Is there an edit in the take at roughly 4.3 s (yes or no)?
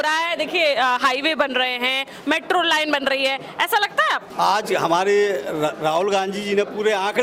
yes